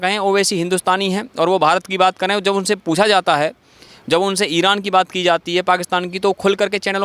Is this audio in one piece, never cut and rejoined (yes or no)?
yes